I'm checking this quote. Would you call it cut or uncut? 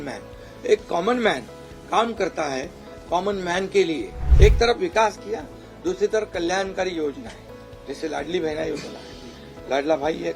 cut